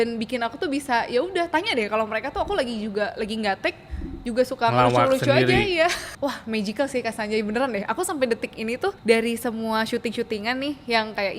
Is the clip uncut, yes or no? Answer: no